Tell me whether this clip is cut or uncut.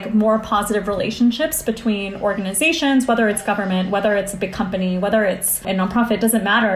cut